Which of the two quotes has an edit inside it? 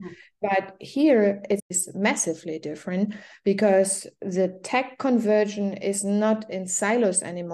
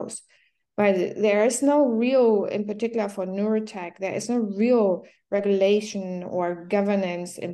first; 1 cut; at 1.8 s

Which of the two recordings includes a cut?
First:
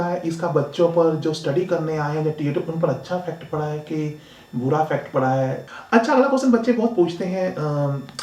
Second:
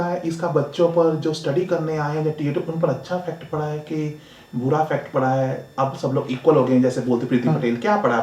first; 1 cut; at 5.6 s

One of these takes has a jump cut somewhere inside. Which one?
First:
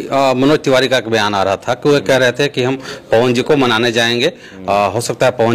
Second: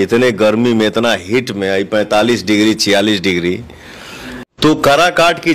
second; 1 cut; at 4.7 s

